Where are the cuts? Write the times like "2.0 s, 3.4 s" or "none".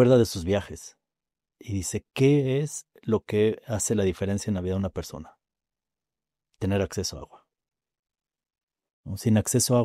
none